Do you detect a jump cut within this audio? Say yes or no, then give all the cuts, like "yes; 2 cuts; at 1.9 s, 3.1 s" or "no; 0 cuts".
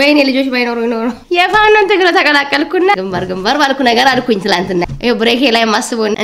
yes; 2 cuts; at 1.2 s, 2.9 s